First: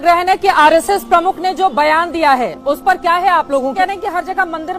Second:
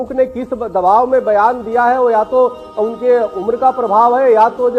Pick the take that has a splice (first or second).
first